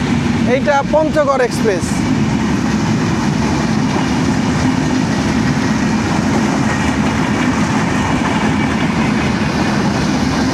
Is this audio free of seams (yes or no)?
yes